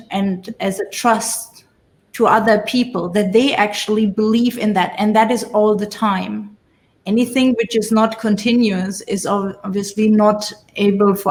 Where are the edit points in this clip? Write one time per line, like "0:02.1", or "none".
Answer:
none